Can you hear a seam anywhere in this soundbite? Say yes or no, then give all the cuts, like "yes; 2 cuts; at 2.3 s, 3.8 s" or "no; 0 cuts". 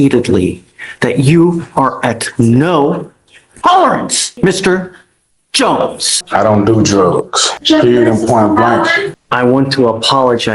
yes; 4 cuts; at 4.2 s, 6.2 s, 7.4 s, 9.1 s